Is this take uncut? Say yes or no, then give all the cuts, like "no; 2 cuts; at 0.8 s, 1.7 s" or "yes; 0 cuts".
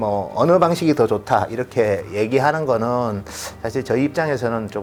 yes; 0 cuts